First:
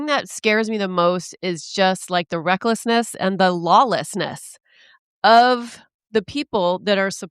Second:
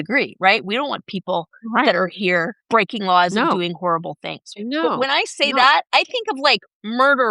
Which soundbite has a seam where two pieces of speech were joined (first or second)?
second